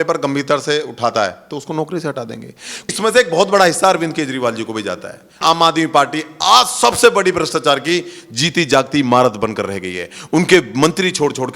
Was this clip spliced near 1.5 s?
no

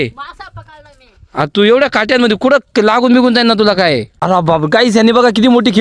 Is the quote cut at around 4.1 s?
yes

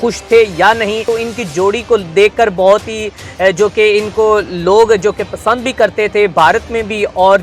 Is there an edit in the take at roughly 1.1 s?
yes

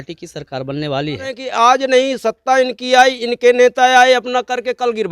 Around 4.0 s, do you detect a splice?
no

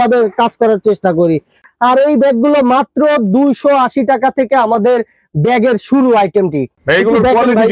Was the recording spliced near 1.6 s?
yes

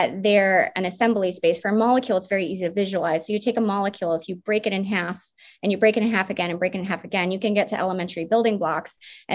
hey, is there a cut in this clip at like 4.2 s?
no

